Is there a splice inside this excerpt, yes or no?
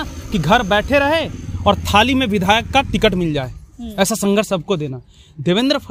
no